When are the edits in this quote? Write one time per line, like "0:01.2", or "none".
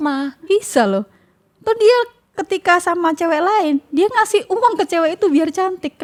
none